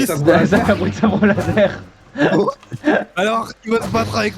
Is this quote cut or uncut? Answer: uncut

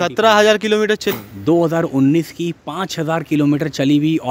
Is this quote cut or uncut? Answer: cut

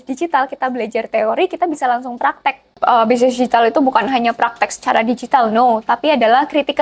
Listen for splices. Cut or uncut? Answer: cut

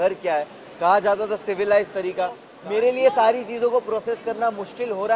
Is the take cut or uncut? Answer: cut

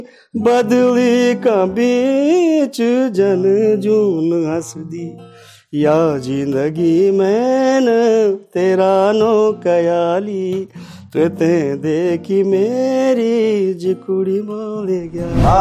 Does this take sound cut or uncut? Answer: uncut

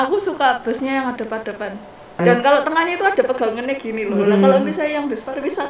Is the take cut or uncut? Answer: cut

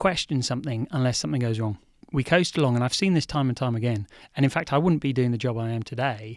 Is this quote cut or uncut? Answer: cut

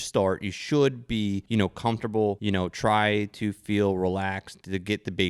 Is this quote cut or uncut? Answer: cut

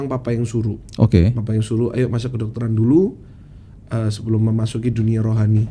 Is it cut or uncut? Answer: uncut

